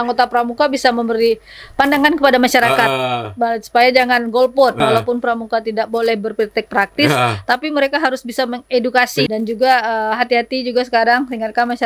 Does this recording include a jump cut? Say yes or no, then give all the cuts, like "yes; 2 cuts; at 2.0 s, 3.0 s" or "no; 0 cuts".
yes; 2 cuts; at 4.8 s, 9.3 s